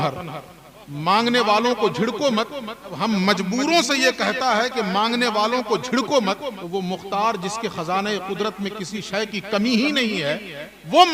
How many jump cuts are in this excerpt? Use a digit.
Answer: 2